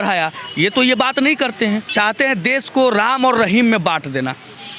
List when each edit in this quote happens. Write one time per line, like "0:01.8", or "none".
0:01.9